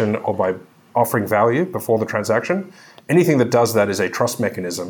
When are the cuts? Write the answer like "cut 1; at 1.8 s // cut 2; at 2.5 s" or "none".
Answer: cut 1; at 1.1 s